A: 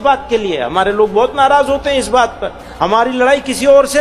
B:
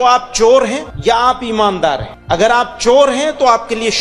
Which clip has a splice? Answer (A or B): B